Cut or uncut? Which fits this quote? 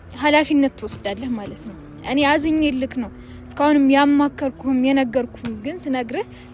uncut